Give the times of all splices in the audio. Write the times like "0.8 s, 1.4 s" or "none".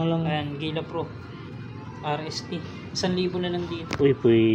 none